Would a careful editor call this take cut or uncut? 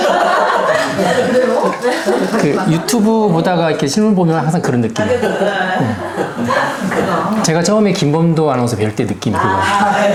uncut